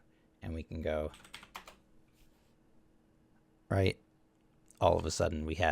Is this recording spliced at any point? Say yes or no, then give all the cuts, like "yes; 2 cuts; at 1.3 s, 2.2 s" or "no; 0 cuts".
yes; 1 cut; at 1.2 s